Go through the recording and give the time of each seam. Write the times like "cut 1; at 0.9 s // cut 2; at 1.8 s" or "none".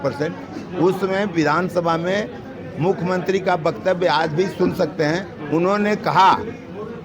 none